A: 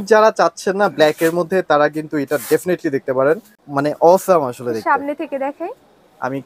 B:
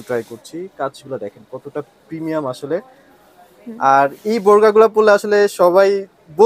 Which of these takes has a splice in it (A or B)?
A